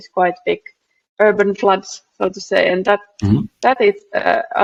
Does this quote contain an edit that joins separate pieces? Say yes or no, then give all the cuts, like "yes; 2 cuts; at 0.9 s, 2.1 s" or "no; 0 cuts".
no; 0 cuts